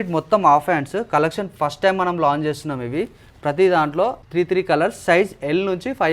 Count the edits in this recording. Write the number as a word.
one